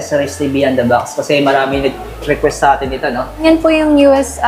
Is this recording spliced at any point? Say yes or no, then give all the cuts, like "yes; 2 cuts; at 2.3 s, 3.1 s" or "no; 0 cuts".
yes; 1 cut; at 3.4 s